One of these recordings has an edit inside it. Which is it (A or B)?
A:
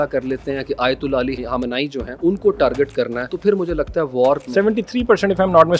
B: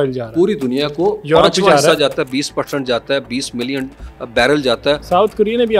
A